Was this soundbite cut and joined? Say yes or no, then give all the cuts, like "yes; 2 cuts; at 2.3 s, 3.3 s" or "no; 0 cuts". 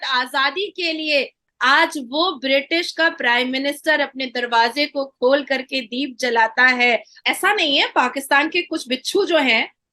yes; 2 cuts; at 1.4 s, 7.1 s